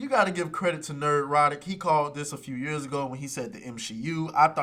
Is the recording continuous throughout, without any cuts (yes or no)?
yes